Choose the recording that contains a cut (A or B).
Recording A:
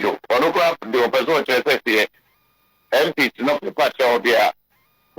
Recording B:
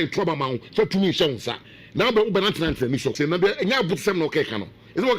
B